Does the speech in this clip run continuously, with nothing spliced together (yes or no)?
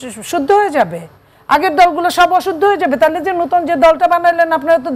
yes